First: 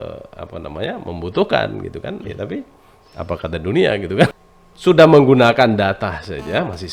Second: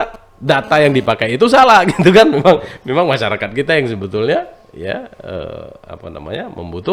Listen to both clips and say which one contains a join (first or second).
first